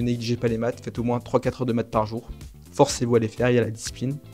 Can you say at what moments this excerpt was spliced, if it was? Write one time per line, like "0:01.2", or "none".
none